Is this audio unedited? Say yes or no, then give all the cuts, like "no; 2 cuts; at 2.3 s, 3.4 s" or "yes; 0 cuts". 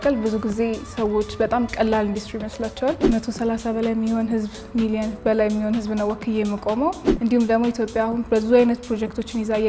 no; 2 cuts; at 3.0 s, 7.1 s